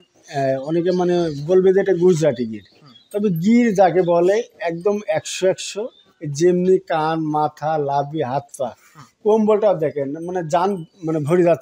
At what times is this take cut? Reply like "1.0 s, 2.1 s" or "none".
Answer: none